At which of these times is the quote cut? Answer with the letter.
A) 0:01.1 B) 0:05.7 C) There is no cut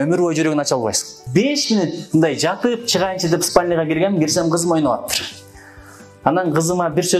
A